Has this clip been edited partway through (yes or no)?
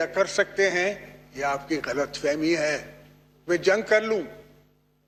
no